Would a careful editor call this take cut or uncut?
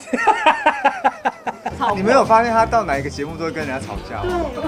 uncut